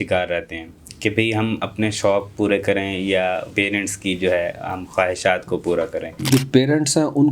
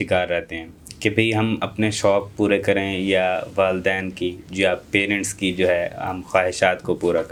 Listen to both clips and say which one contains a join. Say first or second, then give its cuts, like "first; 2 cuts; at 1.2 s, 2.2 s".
first; 2 cuts; at 3.5 s, 6.1 s